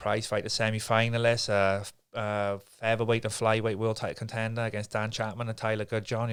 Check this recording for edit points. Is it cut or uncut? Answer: uncut